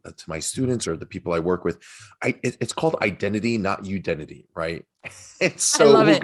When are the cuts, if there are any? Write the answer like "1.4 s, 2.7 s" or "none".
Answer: none